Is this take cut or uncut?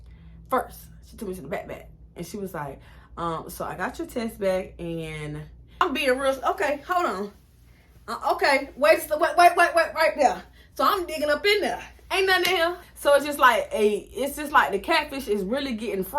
cut